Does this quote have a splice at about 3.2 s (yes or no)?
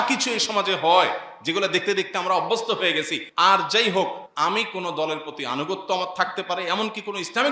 yes